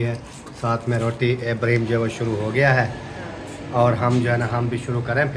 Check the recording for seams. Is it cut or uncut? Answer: uncut